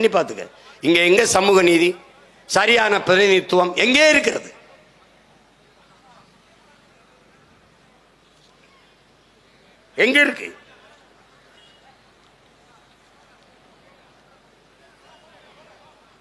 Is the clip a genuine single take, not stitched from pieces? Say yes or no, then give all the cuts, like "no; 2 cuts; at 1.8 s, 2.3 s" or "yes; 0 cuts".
yes; 0 cuts